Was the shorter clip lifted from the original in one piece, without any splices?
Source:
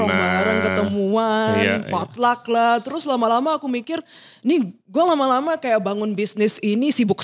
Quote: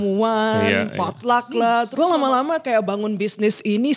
no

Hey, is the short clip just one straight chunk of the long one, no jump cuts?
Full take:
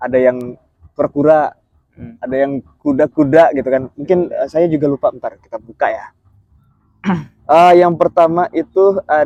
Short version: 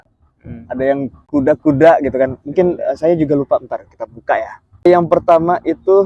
no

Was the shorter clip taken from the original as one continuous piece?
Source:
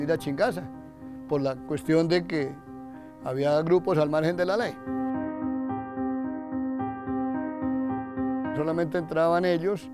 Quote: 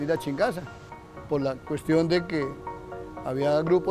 yes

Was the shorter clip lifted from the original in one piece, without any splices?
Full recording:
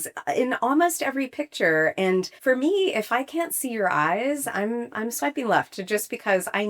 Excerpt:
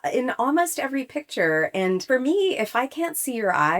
no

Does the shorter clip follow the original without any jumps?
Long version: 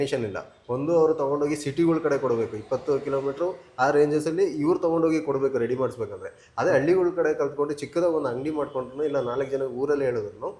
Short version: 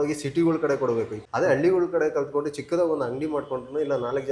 no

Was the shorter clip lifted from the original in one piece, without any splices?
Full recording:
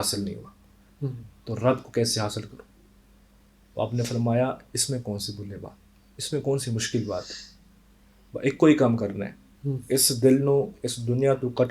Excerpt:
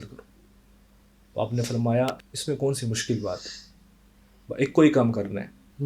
no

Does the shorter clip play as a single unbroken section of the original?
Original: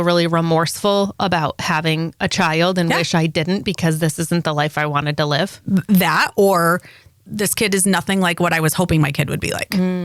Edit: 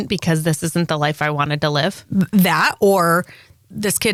yes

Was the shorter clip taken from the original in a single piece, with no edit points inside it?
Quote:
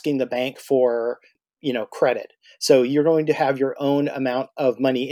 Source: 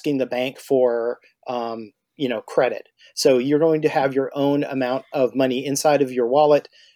no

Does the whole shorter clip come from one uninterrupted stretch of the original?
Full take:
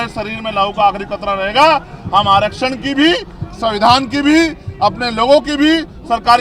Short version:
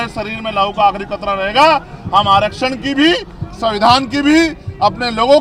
yes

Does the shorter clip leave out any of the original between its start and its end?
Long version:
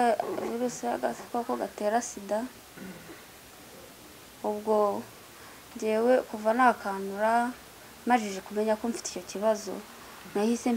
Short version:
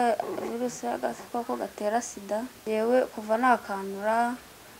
yes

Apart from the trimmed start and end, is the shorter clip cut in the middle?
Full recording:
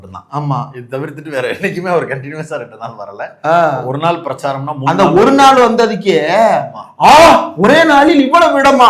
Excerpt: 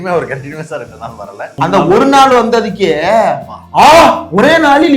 yes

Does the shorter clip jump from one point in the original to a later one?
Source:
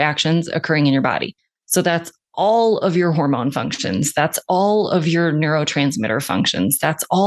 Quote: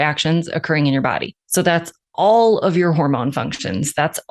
yes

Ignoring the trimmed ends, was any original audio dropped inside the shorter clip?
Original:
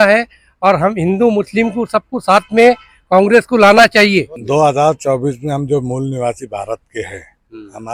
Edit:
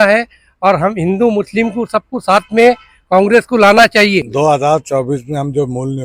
yes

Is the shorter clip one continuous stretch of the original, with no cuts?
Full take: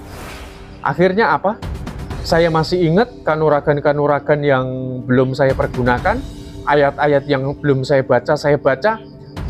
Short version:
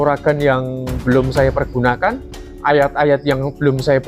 yes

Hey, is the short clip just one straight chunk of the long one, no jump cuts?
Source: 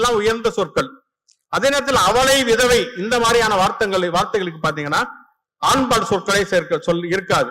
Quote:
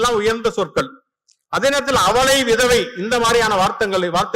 yes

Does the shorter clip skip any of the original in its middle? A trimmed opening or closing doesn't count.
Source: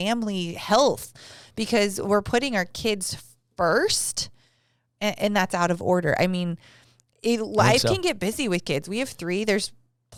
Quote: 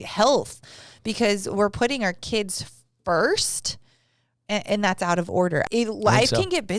yes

